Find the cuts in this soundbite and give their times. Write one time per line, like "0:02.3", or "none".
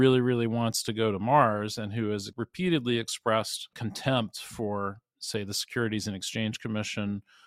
0:02.3
0:03.8